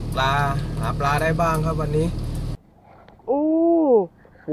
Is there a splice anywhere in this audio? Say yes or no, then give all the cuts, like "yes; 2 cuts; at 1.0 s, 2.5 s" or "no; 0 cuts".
yes; 1 cut; at 2.4 s